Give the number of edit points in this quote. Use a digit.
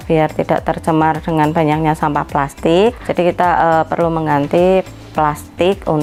0